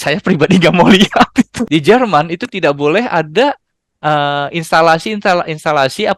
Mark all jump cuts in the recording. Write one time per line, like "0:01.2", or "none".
0:01.6